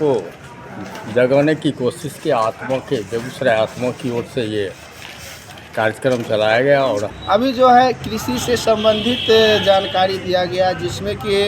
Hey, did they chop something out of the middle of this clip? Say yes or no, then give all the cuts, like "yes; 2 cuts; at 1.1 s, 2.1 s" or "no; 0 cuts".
yes; 1 cut; at 7.1 s